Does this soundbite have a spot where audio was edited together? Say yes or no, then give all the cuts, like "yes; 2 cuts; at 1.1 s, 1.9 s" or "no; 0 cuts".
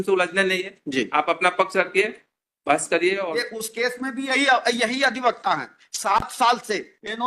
yes; 1 cut; at 3.5 s